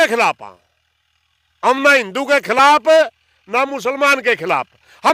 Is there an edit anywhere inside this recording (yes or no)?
no